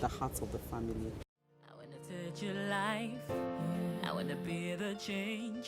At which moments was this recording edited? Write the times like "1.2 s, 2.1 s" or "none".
1.4 s